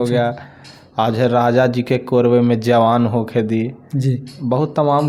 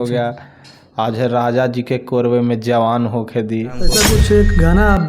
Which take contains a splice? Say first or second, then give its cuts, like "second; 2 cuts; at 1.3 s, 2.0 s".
second; 1 cut; at 3.8 s